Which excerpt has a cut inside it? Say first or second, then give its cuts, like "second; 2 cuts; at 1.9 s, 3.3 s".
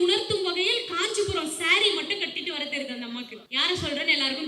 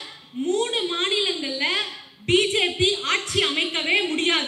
first; 1 cut; at 3.4 s